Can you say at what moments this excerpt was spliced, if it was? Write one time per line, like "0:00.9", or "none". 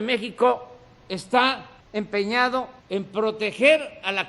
0:01.7
0:02.8